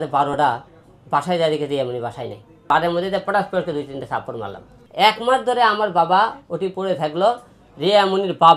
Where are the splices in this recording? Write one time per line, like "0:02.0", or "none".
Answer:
0:02.5
0:04.8